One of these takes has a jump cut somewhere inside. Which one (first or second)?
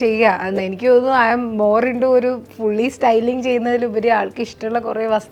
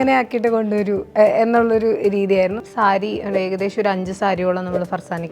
second